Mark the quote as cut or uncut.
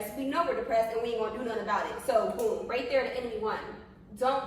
uncut